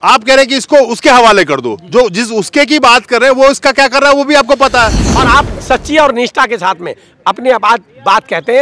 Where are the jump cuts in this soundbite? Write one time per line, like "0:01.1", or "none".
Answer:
0:05.1